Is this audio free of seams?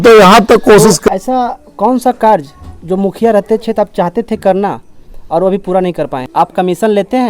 no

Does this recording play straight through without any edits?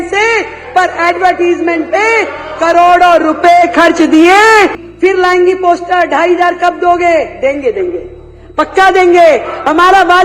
no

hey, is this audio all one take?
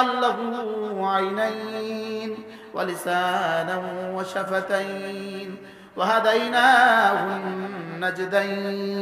yes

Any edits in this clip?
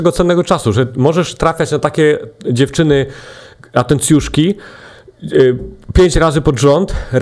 no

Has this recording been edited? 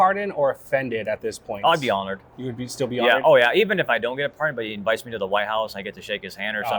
no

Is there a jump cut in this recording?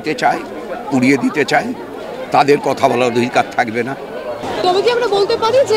no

